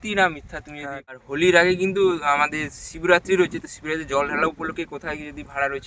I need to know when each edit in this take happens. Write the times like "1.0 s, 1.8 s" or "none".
1.4 s